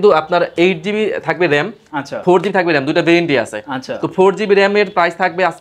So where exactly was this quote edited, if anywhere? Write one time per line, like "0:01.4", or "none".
none